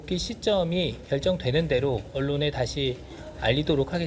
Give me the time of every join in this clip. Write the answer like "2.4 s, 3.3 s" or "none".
none